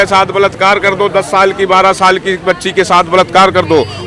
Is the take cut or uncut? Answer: uncut